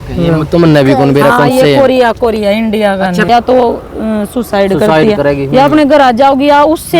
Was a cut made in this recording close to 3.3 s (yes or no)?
yes